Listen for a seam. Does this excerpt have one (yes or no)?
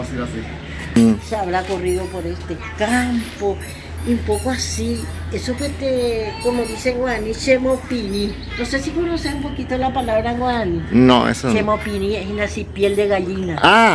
yes